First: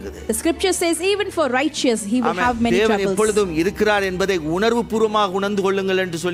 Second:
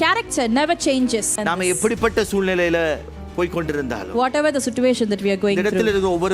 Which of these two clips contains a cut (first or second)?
second